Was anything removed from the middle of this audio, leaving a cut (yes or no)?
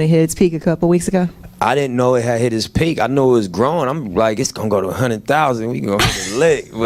no